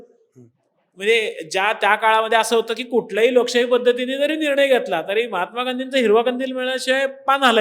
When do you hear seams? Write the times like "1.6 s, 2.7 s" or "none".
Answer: none